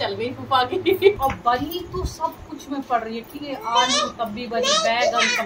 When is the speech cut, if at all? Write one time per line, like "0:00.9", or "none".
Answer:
0:01.2